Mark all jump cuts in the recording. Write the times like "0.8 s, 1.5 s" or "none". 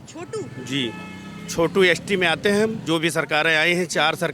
2.8 s